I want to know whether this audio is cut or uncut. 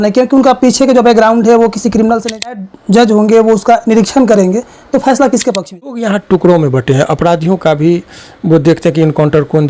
cut